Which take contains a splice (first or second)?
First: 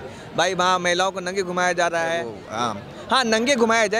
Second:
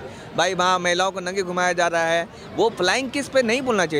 first